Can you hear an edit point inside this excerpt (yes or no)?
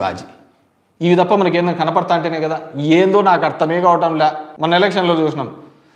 yes